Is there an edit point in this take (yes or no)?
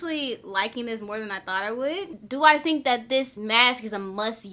yes